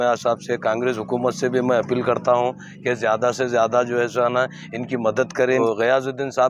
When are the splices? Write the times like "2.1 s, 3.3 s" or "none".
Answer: 5.6 s